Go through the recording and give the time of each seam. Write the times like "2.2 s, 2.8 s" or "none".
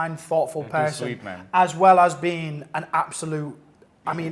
none